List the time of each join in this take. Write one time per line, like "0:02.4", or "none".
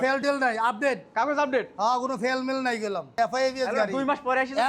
0:03.2